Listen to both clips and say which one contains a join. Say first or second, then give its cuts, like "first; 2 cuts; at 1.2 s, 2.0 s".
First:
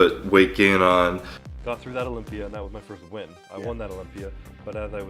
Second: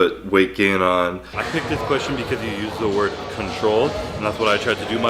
second; 1 cut; at 1.4 s